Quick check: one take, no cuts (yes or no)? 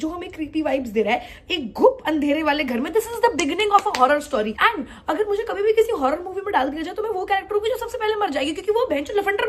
yes